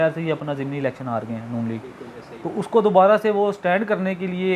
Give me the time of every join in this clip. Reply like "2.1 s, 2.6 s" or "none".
none